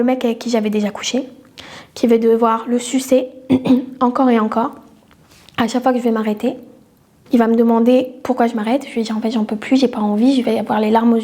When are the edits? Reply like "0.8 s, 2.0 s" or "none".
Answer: none